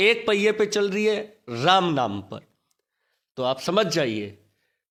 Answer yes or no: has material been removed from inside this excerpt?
no